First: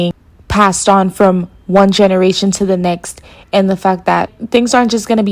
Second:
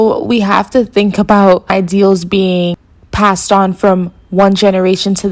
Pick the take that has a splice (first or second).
second